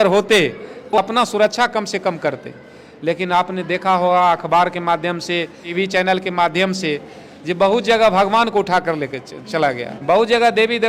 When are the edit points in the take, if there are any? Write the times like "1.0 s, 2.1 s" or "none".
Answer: 1.0 s, 5.6 s, 9.9 s